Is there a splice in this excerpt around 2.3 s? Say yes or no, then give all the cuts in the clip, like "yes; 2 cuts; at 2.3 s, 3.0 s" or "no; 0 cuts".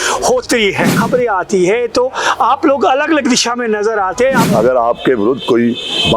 no; 2 cuts; at 1.0 s, 4.4 s